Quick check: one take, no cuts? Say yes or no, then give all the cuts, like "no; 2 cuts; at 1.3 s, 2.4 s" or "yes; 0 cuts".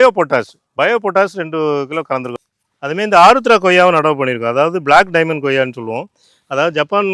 no; 1 cut; at 2.3 s